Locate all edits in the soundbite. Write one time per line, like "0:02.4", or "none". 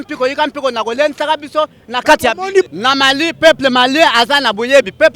0:02.6